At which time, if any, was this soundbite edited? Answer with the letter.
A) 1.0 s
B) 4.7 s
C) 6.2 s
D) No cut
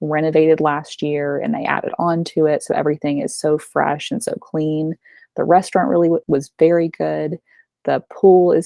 C